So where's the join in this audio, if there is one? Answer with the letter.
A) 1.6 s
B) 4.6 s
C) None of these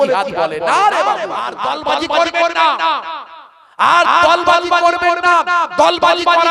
A